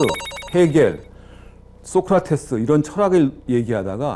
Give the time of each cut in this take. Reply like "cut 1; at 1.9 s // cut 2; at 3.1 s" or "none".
none